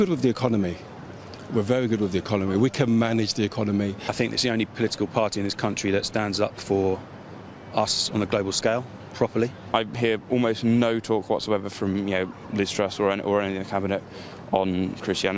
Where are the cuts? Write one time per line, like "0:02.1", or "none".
0:04.0
0:09.6